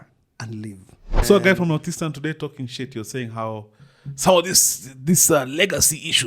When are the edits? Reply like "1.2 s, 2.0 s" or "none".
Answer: 1.2 s